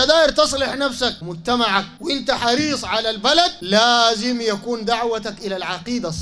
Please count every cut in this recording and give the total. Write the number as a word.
three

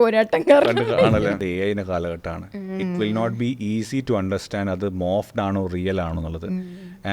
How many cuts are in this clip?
one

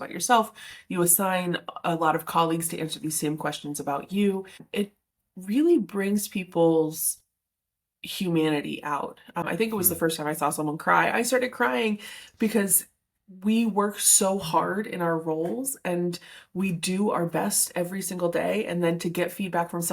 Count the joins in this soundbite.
two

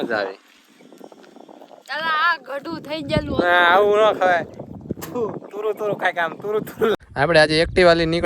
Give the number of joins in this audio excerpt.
one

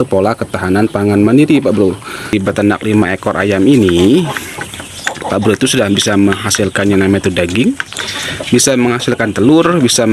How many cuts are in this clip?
one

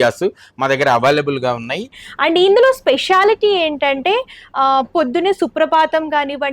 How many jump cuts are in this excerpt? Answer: one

